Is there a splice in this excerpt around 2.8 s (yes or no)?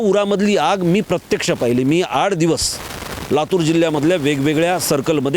no